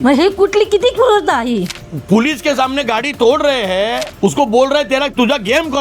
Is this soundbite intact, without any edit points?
no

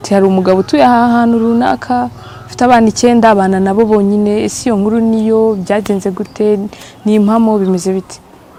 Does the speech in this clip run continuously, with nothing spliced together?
yes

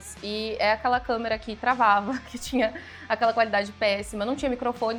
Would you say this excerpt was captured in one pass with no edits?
yes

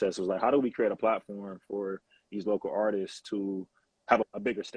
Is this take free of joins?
yes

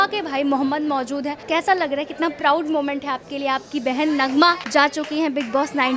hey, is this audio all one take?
no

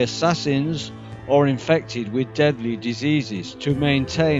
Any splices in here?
yes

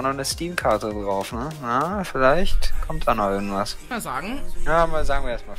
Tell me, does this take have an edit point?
no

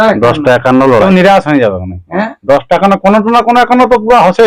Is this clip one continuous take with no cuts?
no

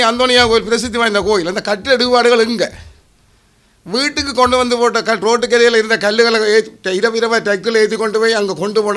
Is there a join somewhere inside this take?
no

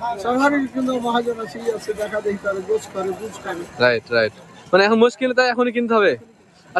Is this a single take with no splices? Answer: yes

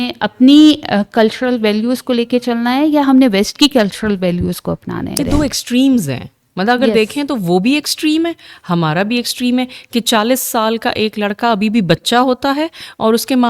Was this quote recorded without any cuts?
no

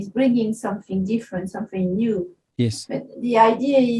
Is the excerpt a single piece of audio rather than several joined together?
yes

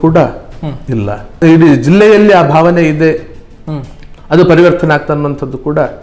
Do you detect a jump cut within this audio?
yes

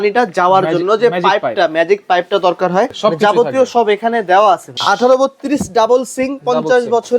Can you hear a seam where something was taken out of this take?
yes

